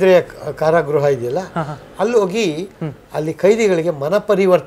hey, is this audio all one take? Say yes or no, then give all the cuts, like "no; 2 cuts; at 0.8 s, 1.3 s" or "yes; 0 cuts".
yes; 0 cuts